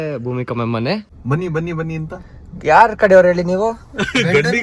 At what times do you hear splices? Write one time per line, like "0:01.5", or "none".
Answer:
0:01.1